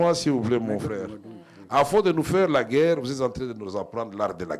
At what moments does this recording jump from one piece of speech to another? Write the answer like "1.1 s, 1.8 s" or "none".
none